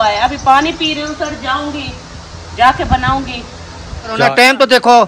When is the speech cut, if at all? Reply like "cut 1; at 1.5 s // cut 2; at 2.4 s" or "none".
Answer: cut 1; at 4.2 s